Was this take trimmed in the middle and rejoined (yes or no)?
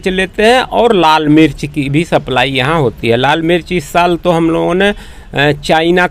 no